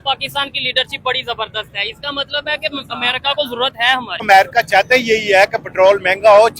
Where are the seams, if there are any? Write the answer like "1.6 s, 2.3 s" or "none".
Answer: 4.2 s